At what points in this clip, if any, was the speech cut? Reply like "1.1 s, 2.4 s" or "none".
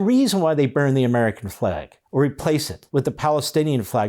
1.9 s, 2.8 s